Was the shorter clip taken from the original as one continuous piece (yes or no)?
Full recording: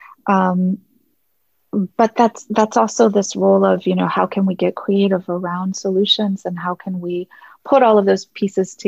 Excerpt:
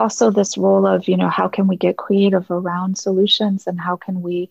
yes